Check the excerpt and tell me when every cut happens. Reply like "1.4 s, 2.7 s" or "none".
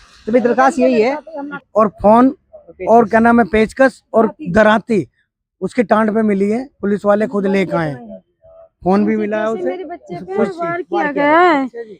1.6 s